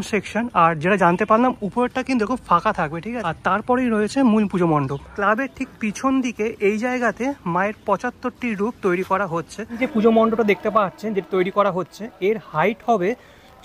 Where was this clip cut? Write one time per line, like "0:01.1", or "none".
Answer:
0:03.2
0:05.0
0:09.8